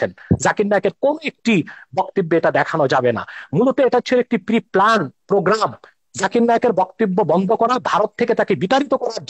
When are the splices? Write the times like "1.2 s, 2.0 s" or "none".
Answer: none